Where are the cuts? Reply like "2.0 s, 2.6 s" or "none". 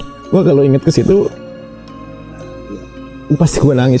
none